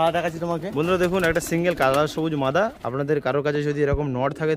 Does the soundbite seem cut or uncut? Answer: uncut